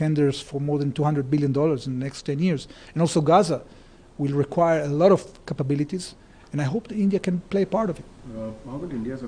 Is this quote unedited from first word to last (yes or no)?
yes